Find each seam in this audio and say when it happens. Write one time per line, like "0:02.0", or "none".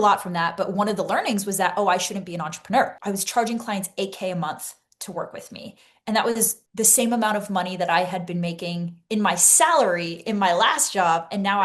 0:02.9